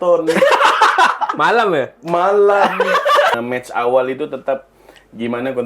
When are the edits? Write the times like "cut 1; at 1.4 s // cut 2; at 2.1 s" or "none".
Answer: cut 1; at 3.3 s

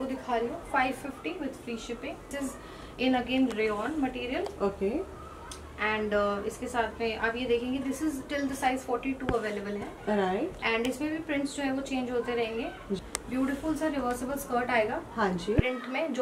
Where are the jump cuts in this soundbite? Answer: cut 1; at 2.3 s // cut 2; at 13.0 s

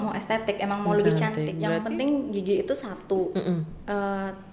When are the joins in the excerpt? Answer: cut 1; at 1.5 s

